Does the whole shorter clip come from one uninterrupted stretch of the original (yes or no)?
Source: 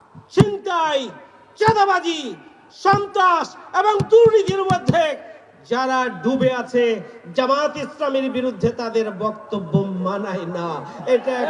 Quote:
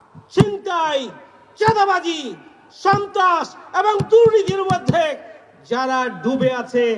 yes